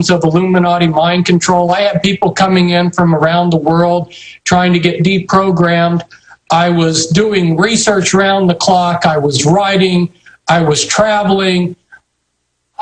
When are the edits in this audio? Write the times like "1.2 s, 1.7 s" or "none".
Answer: 1.4 s